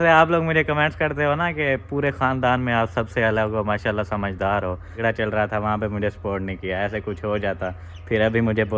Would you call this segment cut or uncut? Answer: cut